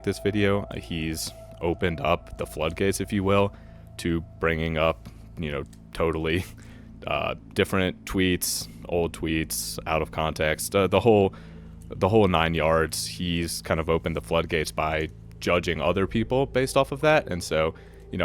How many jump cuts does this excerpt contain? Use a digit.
1